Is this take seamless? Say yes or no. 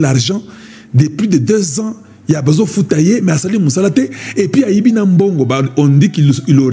yes